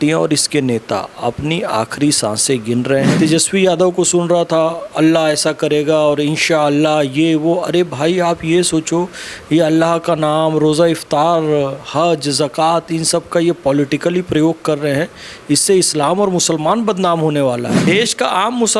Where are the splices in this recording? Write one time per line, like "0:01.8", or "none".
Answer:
0:03.1
0:17.8

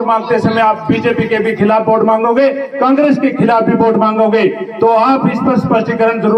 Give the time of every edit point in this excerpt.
none

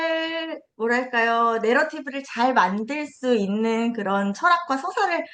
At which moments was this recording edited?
none

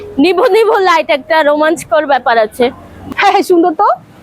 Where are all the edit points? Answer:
0:02.9

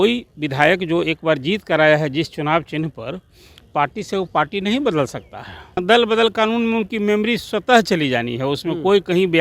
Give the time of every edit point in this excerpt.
0:05.8

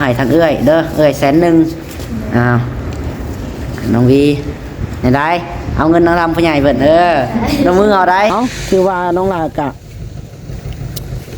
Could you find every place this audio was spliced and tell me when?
0:08.3

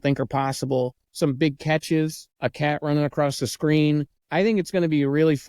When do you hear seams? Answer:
0:01.0
0:02.2
0:04.2

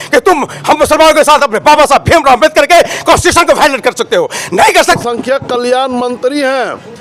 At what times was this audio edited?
0:05.0

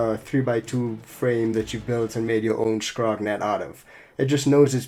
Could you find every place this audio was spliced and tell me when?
none

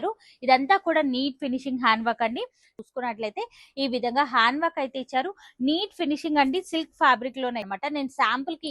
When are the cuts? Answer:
0:02.7
0:07.7

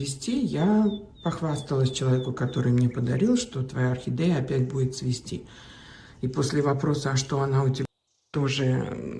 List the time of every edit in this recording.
0:08.0

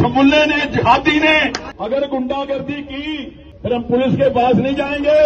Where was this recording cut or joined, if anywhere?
0:01.6
0:03.4

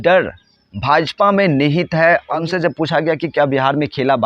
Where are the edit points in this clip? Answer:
0:02.3

